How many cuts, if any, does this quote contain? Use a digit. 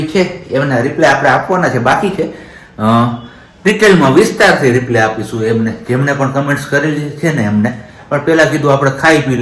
0